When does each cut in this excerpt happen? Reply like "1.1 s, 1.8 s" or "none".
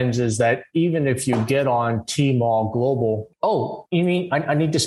3.3 s